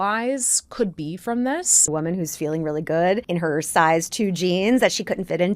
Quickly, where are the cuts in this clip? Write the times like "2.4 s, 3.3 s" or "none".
1.9 s, 3.2 s